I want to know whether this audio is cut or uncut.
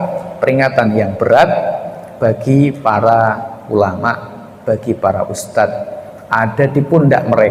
uncut